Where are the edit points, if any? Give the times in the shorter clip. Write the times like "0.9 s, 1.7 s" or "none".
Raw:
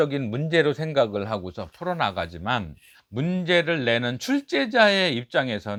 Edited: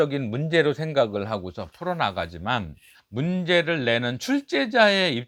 none